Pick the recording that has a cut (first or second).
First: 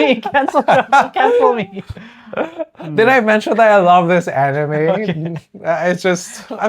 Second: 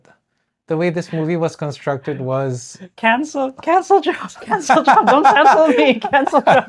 first